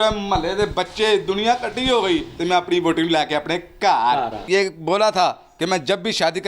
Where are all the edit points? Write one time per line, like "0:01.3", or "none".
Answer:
0:04.4